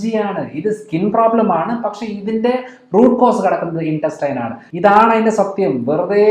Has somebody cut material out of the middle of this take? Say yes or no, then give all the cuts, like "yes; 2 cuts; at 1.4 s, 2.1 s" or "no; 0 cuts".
yes; 1 cut; at 4.6 s